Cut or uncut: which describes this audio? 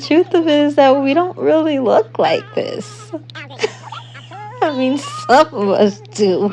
uncut